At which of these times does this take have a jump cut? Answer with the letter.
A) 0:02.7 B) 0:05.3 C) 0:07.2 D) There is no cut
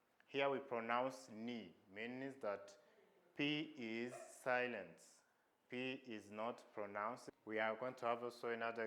C